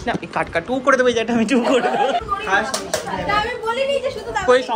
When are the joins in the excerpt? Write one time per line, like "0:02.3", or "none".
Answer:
0:02.2